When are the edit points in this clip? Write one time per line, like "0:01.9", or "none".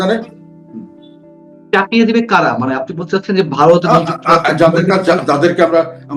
none